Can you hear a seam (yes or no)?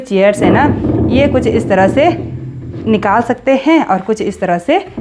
no